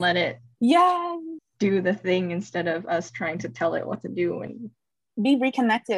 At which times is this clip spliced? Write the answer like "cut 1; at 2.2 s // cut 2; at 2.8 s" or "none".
none